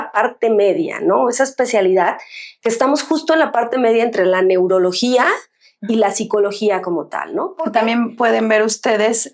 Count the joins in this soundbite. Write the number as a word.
one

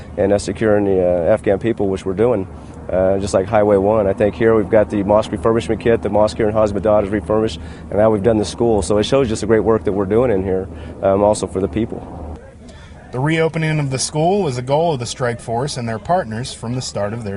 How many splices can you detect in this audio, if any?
zero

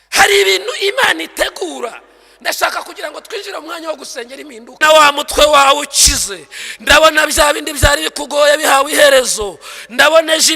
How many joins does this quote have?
one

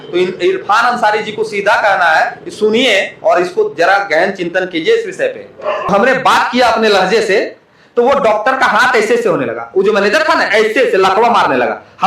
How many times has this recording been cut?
one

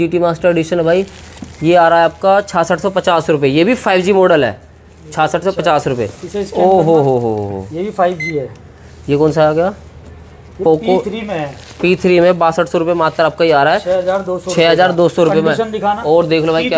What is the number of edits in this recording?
zero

